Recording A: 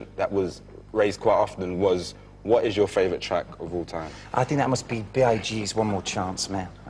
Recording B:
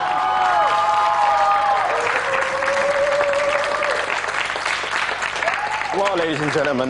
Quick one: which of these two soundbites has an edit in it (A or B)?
B